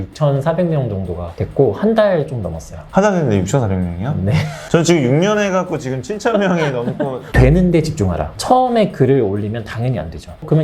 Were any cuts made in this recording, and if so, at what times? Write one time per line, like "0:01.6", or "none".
0:07.3